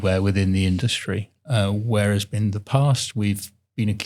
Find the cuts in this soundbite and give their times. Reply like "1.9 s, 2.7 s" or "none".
none